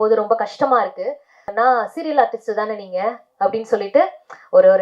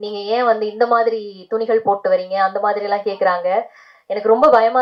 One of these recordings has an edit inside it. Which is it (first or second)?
first